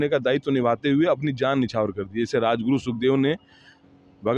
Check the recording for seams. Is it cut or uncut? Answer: uncut